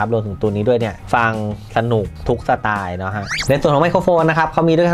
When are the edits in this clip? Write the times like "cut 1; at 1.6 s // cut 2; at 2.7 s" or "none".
cut 1; at 1.0 s // cut 2; at 2.1 s // cut 3; at 3.4 s

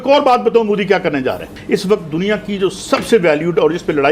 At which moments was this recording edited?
cut 1; at 1.5 s

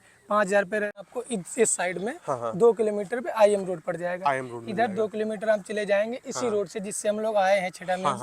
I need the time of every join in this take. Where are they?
cut 1; at 1.0 s

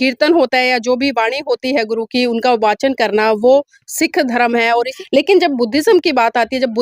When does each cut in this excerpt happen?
cut 1; at 4.9 s

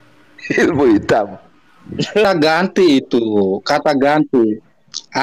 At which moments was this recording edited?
cut 1; at 2.3 s

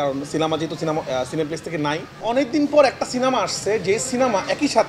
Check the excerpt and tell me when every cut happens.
cut 1; at 2.1 s

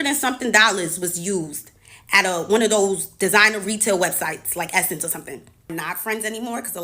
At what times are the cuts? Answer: cut 1; at 5.7 s

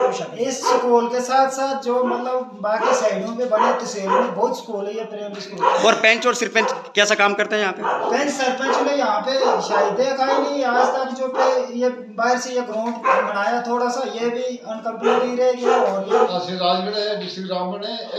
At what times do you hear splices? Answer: cut 1; at 16.3 s

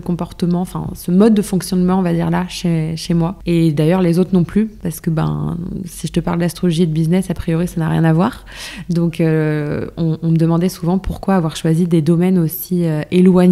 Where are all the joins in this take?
cut 1; at 3.4 s // cut 2; at 4.8 s

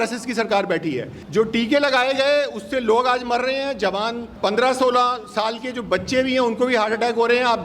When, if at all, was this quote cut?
cut 1; at 1.1 s // cut 2; at 4.3 s

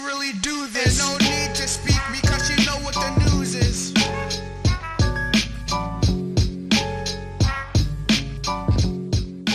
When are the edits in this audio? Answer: cut 1; at 3.3 s

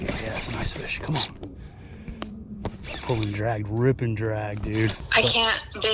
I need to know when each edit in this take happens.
cut 1; at 5.0 s

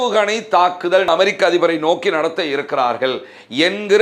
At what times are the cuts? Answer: cut 1; at 1.1 s

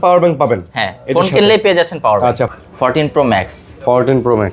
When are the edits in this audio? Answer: cut 1; at 2.5 s

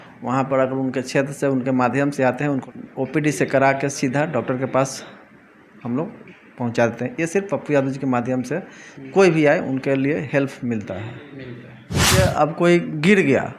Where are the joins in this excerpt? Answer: cut 1; at 2.7 s // cut 2; at 12.2 s

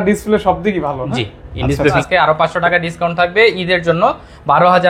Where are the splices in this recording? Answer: cut 1; at 2.0 s

